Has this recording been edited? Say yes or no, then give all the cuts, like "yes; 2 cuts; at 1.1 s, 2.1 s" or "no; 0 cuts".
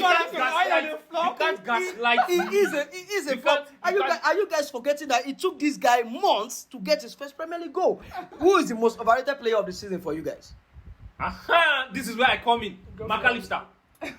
yes; 1 cut; at 8.1 s